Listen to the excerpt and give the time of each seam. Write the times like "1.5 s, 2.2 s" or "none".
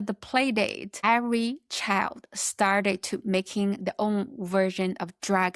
1.0 s